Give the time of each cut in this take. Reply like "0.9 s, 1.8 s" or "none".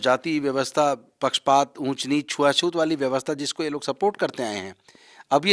none